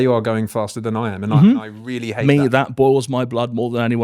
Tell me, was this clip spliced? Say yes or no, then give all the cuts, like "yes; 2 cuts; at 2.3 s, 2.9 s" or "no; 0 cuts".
yes; 1 cut; at 2.2 s